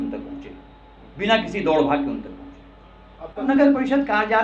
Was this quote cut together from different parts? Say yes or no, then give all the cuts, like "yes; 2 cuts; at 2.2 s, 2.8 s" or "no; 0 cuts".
yes; 1 cut; at 3.4 s